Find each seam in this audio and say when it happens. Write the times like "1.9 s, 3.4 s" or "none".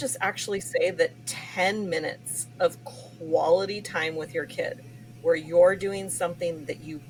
none